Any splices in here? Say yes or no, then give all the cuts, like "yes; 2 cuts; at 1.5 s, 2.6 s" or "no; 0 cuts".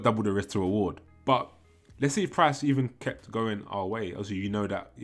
yes; 1 cut; at 1.0 s